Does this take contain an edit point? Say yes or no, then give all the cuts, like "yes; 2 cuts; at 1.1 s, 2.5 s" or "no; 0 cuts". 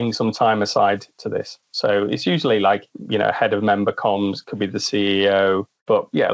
no; 0 cuts